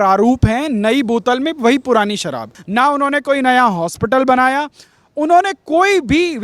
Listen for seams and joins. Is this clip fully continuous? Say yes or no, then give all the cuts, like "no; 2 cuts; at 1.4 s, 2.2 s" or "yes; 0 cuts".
no; 1 cut; at 2.5 s